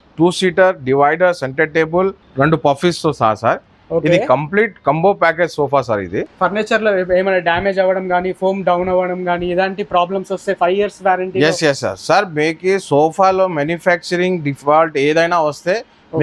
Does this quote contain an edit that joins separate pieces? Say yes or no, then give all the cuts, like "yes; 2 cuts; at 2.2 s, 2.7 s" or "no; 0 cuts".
yes; 2 cuts; at 2.2 s, 6.3 s